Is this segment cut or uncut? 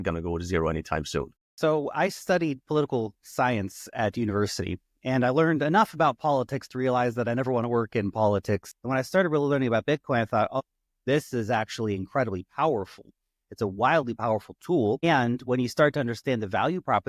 cut